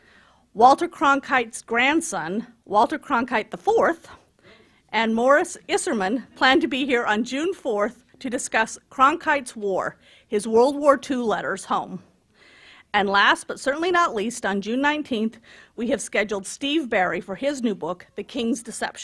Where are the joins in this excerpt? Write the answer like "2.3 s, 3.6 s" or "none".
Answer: 5.1 s